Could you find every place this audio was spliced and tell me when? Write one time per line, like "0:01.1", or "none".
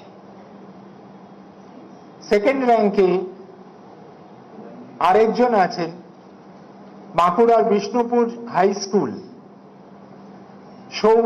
none

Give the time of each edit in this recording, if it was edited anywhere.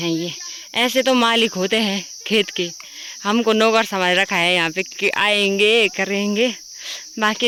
none

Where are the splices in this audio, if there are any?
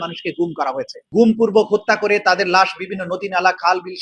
0:00.9

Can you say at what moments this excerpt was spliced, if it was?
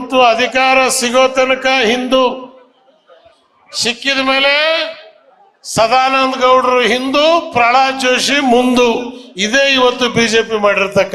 none

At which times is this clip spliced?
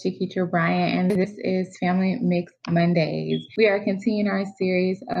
0:03.5

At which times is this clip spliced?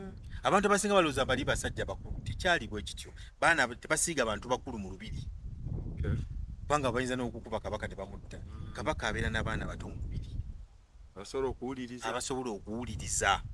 none

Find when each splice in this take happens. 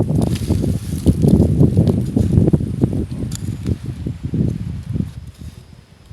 0:05.1

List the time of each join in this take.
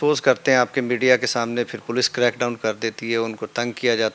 none

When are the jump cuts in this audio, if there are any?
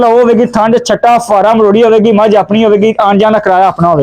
none

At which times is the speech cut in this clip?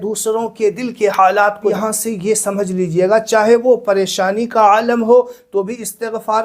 0:01.7

